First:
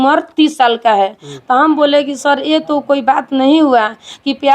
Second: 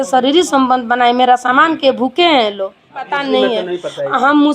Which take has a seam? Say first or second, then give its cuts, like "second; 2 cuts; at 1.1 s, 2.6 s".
second; 1 cut; at 3.1 s